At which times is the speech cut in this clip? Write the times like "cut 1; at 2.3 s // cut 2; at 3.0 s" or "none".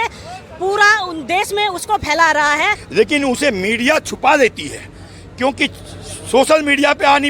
cut 1; at 2.8 s